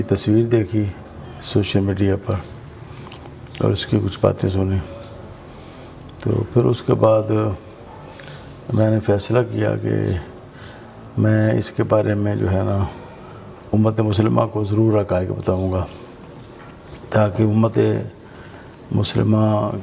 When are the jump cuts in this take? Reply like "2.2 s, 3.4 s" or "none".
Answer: none